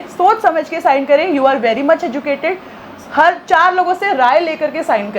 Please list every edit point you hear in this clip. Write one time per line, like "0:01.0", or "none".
none